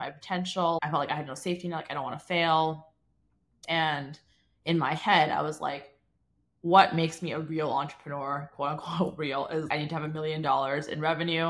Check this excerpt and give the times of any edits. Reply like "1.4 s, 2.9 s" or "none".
0.8 s, 3.6 s, 9.7 s